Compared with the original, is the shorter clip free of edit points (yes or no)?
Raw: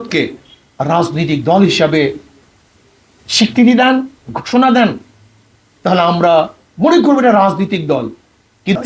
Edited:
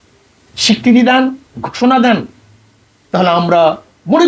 yes